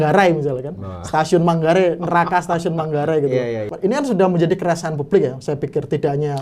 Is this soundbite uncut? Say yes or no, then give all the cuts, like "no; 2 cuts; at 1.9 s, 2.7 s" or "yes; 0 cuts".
no; 1 cut; at 3.7 s